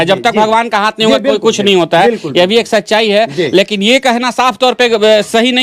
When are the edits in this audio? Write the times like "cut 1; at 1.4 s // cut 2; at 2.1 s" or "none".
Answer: none